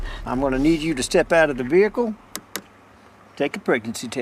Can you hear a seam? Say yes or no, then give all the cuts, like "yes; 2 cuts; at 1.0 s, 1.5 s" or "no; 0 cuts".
no; 0 cuts